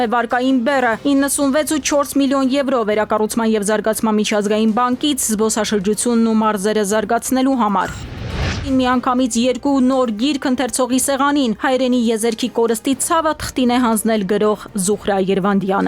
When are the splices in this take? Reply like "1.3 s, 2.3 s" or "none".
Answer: none